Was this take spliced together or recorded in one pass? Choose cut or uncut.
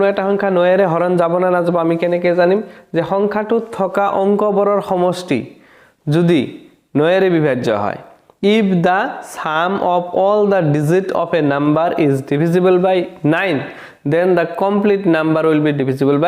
uncut